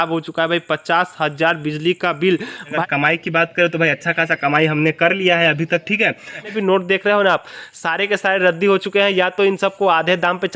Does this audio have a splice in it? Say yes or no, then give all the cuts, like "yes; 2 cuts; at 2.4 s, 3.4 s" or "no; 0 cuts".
yes; 2 cuts; at 2.8 s, 6.5 s